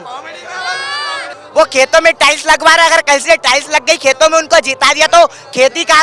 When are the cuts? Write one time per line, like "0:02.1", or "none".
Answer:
0:01.2

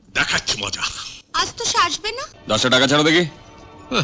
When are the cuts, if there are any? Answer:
0:02.3

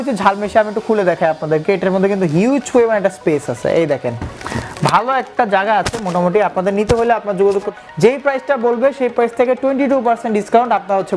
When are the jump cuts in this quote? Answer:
0:07.7

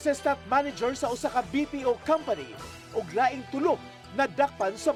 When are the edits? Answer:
none

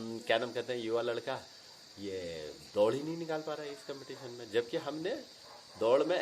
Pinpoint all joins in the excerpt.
none

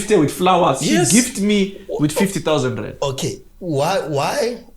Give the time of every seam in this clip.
none

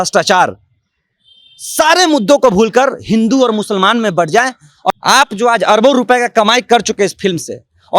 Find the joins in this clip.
0:04.9

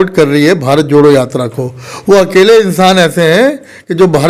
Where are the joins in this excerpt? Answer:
none

